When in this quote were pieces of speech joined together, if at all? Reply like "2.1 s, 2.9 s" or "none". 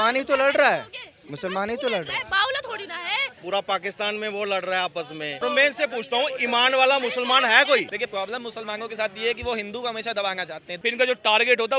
3.3 s, 5.4 s, 7.9 s, 10.7 s

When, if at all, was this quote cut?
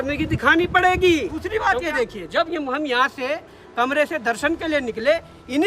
1.4 s

